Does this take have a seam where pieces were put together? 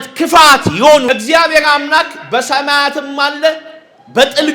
yes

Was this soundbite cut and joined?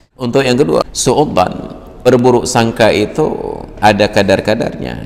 yes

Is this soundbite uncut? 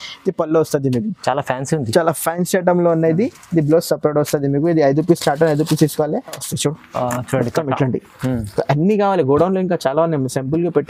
no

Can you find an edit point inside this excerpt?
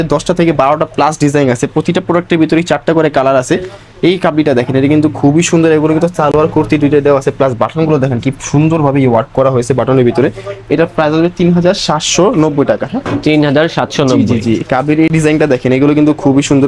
no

